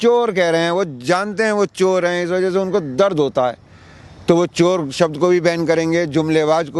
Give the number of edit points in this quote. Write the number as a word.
zero